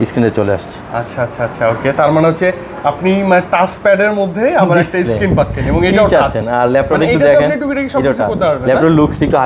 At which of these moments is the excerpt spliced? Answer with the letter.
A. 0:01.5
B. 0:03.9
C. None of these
C